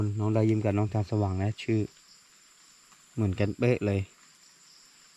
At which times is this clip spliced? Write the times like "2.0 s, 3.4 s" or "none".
none